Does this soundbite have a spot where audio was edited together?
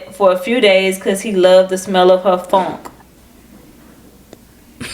yes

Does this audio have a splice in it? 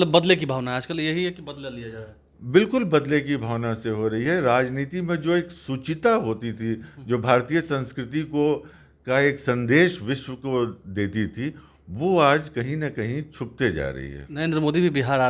no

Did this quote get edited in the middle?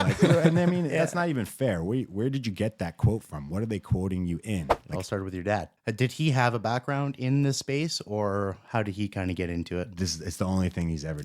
yes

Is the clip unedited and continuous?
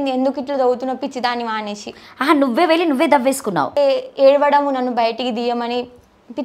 no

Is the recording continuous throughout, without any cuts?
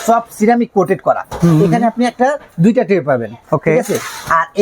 yes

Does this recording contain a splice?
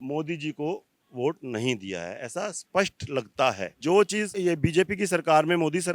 yes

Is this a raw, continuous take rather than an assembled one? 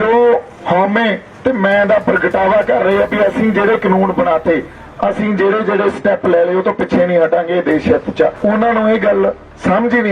no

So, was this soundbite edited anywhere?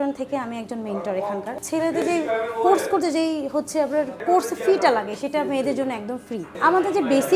yes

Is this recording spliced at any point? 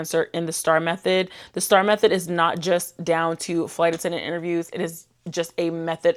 no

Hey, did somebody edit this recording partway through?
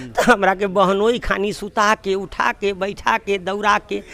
no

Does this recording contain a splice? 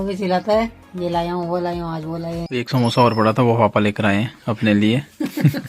yes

